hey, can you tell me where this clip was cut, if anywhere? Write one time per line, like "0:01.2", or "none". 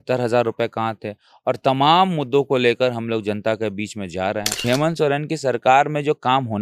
0:04.6